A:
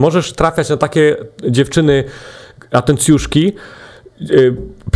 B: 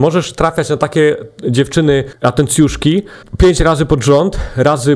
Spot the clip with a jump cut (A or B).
B